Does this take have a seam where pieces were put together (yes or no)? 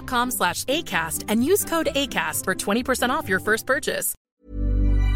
yes